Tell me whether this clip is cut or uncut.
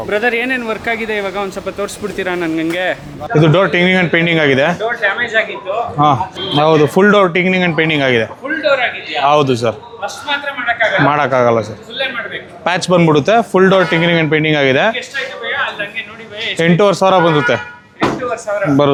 uncut